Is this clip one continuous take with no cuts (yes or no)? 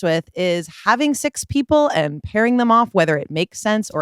yes